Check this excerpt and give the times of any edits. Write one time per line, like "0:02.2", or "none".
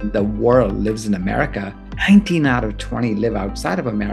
0:01.8